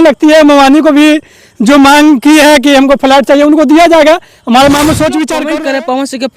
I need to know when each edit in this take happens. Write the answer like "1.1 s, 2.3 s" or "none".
5.4 s